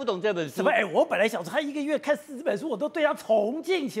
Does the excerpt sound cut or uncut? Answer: uncut